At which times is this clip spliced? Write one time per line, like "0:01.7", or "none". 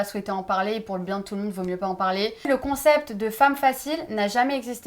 0:02.5